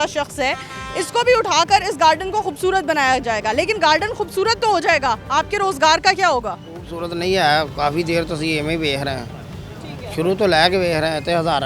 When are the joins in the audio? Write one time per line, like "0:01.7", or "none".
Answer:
none